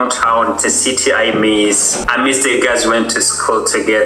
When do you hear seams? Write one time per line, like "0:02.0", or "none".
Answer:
0:02.0